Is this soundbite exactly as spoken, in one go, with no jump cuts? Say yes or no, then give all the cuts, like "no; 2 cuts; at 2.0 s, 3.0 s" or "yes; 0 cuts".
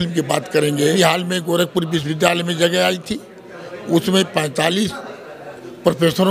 no; 1 cut; at 0.9 s